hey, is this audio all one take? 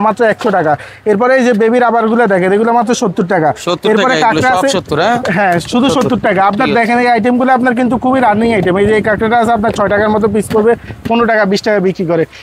yes; 0 cuts

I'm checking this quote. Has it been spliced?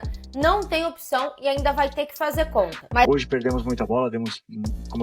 yes; 1 cut; at 3.1 s

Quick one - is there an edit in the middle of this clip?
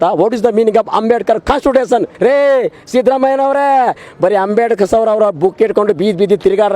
yes; 1 cut; at 2.1 s

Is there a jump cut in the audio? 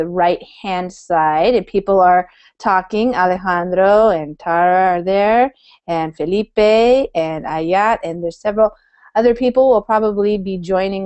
yes; 1 cut; at 9.0 s

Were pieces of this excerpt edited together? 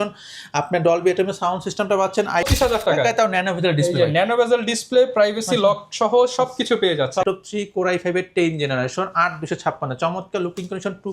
yes; 2 cuts; at 2.5 s, 7.2 s

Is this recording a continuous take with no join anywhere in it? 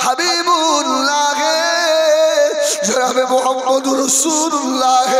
yes; 0 cuts

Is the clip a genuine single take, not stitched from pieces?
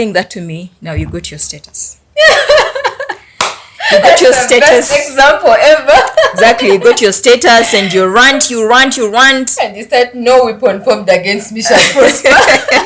yes; 0 cuts

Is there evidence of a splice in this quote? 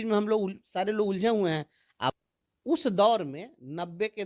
yes; 1 cut; at 2.1 s

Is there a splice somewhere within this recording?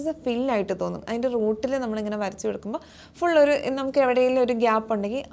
no; 0 cuts

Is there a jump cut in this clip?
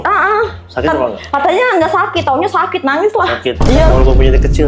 no; 0 cuts

